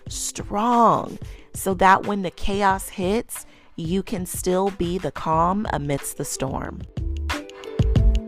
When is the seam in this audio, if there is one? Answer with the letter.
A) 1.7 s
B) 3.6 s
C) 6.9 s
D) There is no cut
C